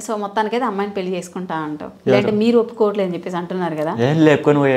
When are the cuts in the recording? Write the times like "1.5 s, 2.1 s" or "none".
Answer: 1.9 s